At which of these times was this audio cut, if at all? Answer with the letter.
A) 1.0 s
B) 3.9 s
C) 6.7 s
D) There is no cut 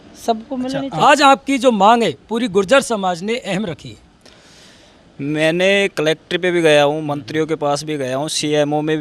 A